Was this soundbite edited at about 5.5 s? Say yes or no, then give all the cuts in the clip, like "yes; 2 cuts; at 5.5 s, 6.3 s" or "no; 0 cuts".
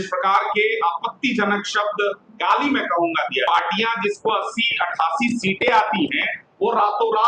no; 1 cut; at 3.4 s